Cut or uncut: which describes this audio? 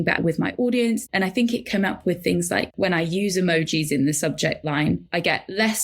cut